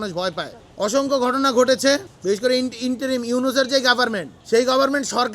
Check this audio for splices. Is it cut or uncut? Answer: cut